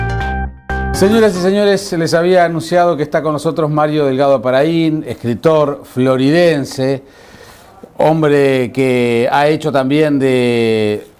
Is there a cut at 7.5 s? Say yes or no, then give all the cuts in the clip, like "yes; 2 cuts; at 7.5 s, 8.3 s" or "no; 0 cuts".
no; 1 cut; at 0.9 s